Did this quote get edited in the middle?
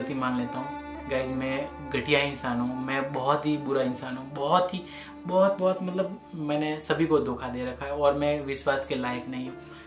no; 0 cuts

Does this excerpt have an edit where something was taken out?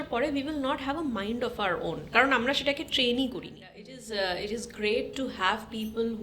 yes; 1 cut; at 3.8 s

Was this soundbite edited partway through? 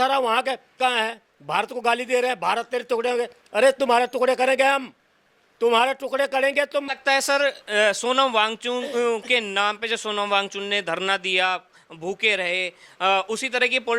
yes; 1 cut; at 6.9 s

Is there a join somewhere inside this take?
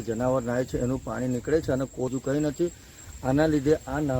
yes; 1 cut; at 2.1 s

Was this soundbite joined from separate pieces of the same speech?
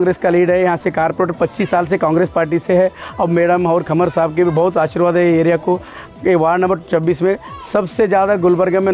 yes; 1 cut; at 5.9 s

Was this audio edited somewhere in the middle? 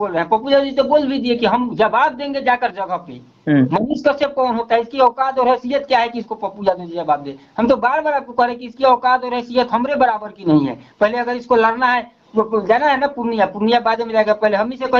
no; 0 cuts

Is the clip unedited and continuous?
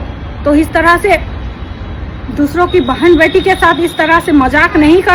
yes; 0 cuts

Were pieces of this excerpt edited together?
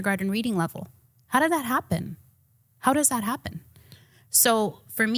no; 0 cuts

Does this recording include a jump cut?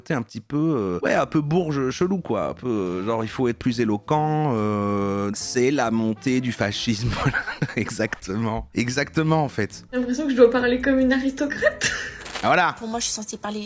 yes; 2 cuts; at 5.3 s, 9.8 s

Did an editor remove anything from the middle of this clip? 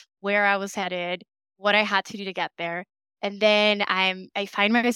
no; 0 cuts

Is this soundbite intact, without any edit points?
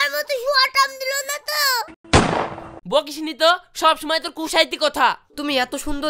no; 1 cut; at 5.2 s

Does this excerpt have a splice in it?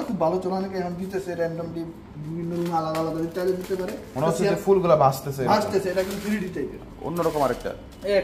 no; 0 cuts

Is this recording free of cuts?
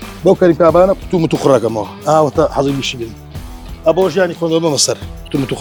yes; 0 cuts

